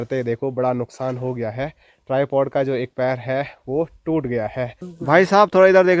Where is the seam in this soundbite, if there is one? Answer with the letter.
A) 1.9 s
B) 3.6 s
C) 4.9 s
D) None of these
C